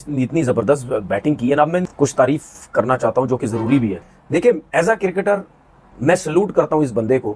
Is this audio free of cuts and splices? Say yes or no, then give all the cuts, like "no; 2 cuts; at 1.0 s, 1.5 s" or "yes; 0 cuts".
yes; 0 cuts